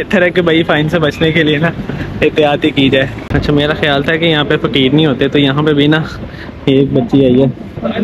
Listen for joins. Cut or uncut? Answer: cut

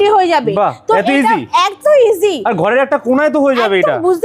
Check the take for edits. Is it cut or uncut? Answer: uncut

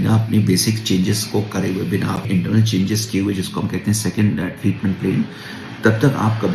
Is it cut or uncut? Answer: uncut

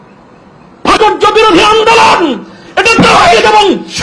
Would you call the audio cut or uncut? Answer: cut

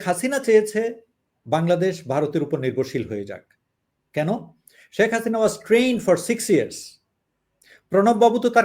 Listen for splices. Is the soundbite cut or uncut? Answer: uncut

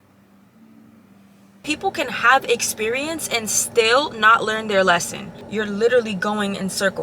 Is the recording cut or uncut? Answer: cut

